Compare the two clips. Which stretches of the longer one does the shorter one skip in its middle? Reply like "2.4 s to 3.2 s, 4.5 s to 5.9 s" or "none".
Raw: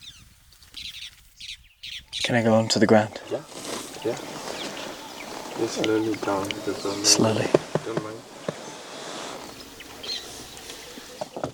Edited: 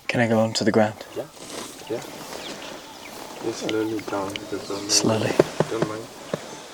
none

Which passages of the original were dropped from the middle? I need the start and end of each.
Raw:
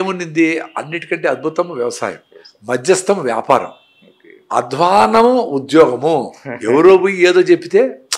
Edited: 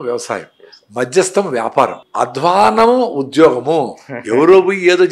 3.7 s to 4.4 s

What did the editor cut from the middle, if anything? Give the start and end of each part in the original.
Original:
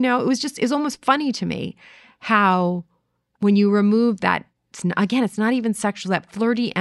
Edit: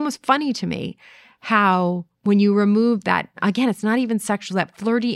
2.9 s to 3.3 s, 4.6 s to 4.9 s

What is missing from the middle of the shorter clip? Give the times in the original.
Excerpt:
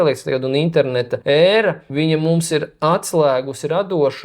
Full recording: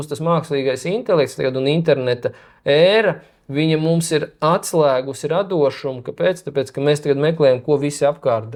2.3 s to 2.6 s, 3.2 s to 3.4 s

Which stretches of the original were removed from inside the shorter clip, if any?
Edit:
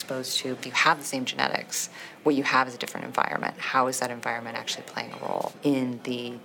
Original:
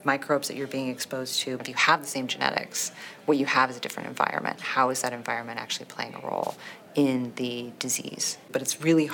6.6 s to 6.9 s

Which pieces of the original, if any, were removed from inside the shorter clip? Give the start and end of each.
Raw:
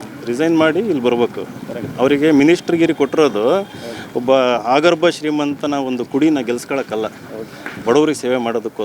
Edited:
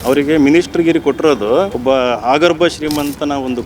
3.7 s to 4.2 s

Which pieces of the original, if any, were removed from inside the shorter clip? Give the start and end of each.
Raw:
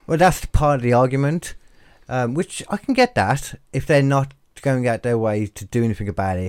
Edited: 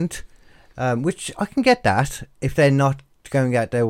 none

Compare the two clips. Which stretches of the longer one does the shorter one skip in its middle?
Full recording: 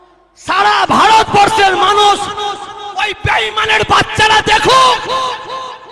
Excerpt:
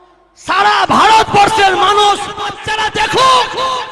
2.6 s to 4.1 s

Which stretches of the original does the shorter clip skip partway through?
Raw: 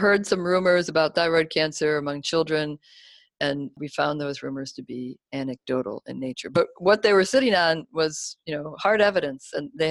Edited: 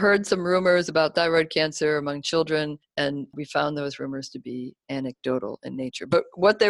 2.8 s to 3.3 s

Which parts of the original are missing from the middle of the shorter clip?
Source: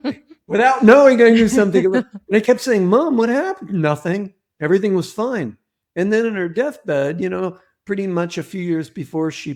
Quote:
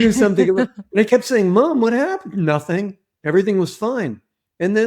none

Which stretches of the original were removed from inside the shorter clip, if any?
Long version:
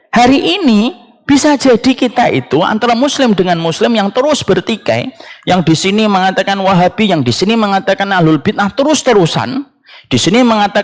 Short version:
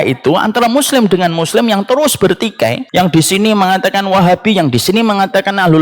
5.1 s to 5.3 s

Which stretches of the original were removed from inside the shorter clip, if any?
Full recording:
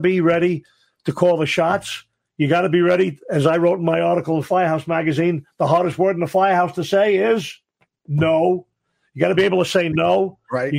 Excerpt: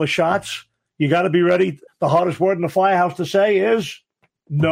3.2 s to 5.4 s

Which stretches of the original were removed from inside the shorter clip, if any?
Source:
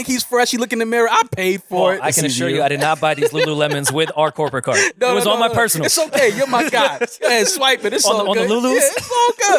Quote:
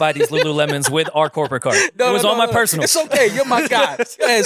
none

